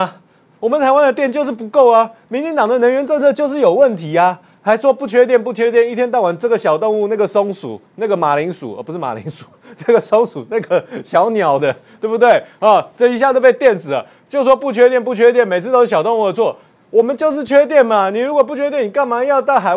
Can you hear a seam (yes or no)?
no